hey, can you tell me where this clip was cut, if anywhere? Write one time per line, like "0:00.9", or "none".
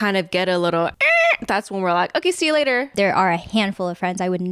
0:01.0
0:02.9